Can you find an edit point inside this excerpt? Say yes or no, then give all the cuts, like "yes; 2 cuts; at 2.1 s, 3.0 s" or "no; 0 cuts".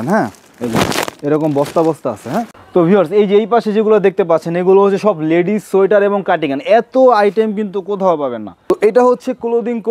yes; 2 cuts; at 2.6 s, 8.6 s